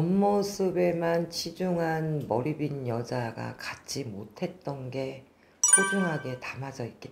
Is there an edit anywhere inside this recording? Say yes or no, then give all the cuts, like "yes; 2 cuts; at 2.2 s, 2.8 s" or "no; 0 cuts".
no; 0 cuts